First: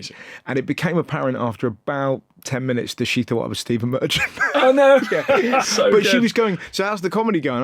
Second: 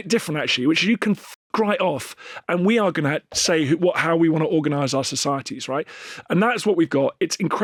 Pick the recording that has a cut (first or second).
first